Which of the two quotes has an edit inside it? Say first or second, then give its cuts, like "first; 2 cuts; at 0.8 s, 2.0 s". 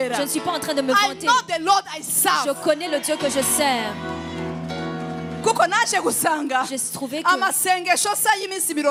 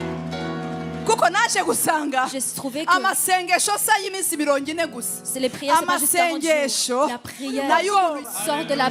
second; 1 cut; at 7.9 s